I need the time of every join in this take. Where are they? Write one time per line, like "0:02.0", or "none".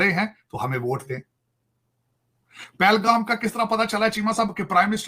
none